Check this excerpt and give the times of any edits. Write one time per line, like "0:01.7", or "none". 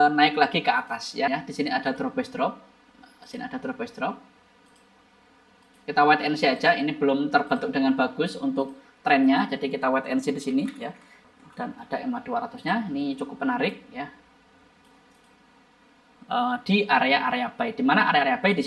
0:01.3
0:11.3
0:16.1